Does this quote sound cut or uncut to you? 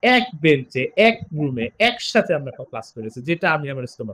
uncut